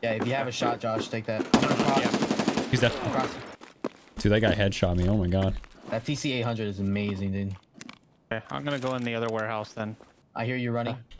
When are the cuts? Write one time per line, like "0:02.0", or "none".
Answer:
0:03.5
0:05.7
0:10.2